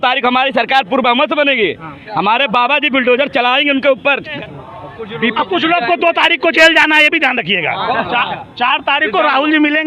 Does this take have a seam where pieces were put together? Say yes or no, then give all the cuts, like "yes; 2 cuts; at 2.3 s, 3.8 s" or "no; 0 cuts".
yes; 2 cuts; at 4.4 s, 8.0 s